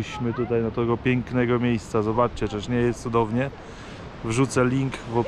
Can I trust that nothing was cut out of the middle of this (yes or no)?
yes